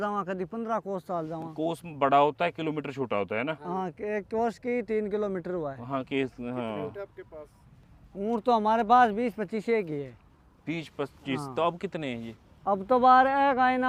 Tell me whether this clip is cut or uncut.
uncut